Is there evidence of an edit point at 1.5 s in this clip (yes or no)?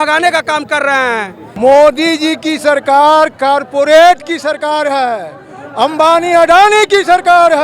yes